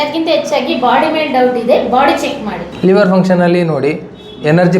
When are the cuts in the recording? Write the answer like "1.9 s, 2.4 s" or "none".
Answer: 2.6 s